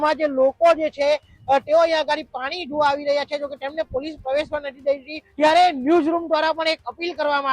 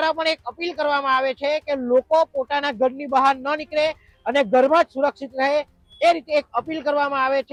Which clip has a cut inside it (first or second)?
first